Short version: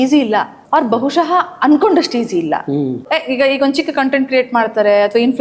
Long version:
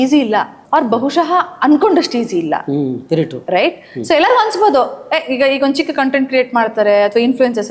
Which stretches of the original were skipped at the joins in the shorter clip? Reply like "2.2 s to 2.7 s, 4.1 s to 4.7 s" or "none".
3.0 s to 5.0 s